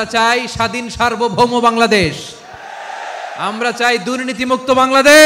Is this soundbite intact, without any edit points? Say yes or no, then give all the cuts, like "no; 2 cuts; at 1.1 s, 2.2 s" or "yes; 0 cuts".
yes; 0 cuts